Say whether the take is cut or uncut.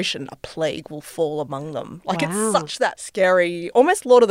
cut